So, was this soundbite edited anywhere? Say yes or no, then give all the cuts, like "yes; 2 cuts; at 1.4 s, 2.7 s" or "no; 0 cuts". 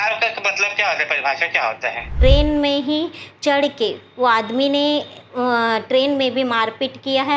yes; 1 cut; at 2.1 s